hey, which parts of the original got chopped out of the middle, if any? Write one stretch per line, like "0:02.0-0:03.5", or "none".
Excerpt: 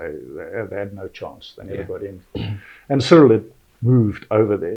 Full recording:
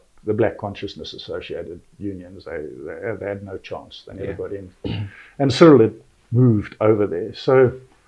none